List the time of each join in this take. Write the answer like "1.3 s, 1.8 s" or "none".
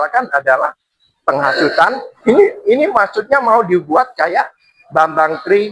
2.1 s